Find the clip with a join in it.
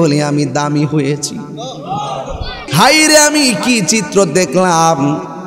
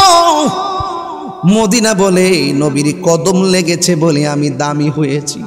first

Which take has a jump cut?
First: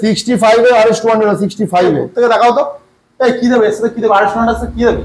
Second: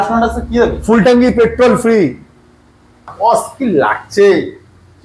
second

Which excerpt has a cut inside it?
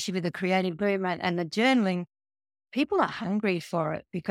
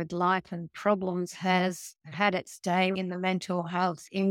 second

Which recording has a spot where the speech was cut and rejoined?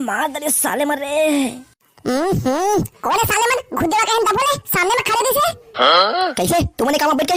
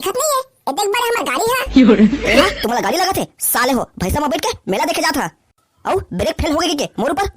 second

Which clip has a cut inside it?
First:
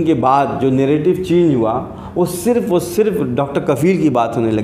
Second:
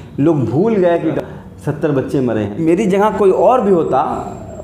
second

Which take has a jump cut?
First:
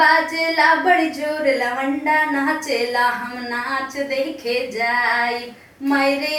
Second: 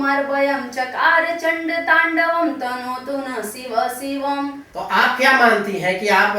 second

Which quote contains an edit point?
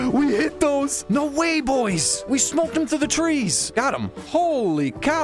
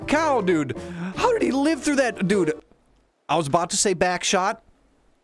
first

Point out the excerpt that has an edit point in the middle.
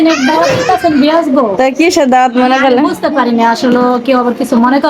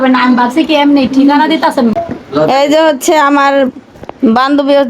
second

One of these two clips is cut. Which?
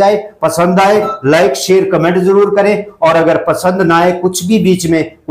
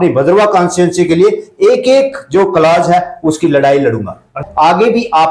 second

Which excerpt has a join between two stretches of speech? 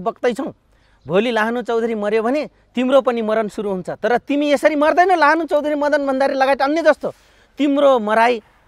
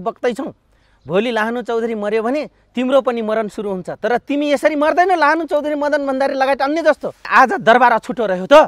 second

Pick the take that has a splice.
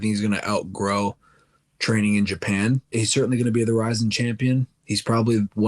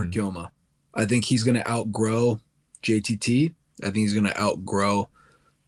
first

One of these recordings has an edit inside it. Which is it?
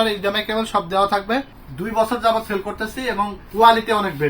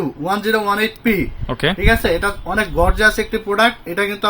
first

